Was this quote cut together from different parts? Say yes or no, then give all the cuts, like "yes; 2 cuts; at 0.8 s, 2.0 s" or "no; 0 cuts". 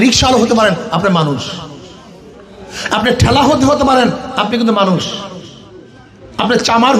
no; 0 cuts